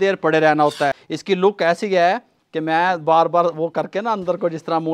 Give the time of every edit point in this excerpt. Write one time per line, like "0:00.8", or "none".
0:01.1